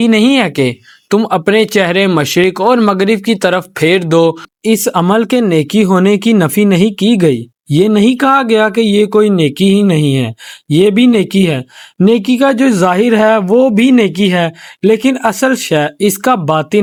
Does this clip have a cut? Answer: no; 0 cuts

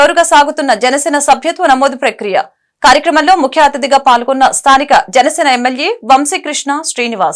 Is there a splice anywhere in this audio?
no; 0 cuts

